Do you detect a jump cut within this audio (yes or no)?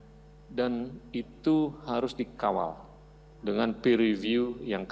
no